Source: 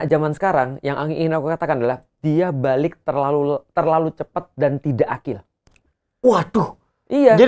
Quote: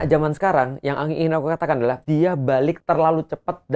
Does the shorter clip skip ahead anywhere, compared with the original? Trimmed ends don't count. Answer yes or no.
yes